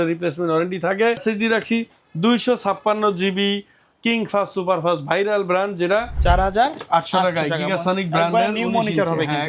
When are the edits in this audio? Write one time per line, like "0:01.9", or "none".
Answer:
0:01.2
0:06.1

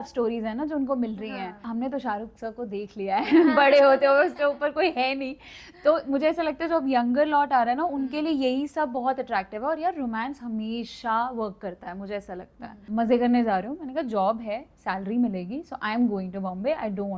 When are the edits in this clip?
0:01.7
0:12.8

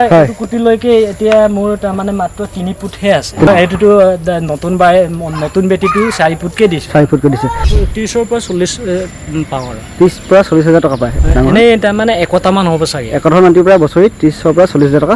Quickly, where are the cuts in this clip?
0:03.5
0:07.7
0:11.1

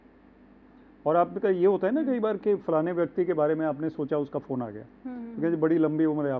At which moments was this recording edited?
none

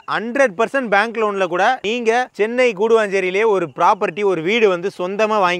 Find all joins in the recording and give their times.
0:01.8

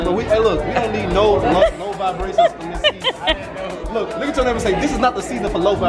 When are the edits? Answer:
none

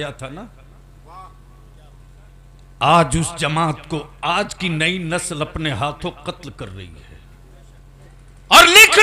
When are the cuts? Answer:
0:08.0

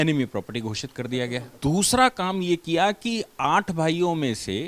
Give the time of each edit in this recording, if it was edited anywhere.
0:01.5

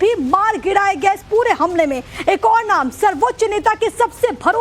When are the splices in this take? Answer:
none

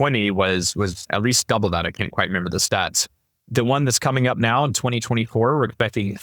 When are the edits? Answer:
0:01.0

